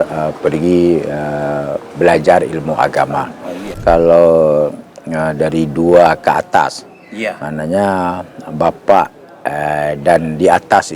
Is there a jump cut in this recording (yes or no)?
yes